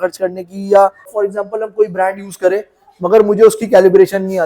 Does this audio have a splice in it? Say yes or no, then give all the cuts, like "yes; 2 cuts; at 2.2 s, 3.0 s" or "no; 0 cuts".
yes; 1 cut; at 1.1 s